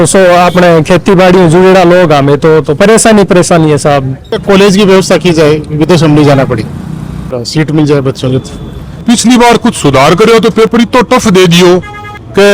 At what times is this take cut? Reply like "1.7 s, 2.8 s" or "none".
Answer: 4.4 s, 9.0 s